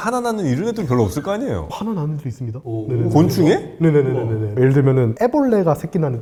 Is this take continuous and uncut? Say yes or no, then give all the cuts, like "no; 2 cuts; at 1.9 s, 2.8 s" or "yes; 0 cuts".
yes; 0 cuts